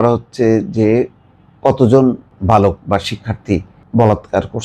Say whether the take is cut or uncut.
cut